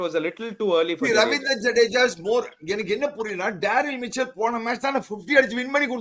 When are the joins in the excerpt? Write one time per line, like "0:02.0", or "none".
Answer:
none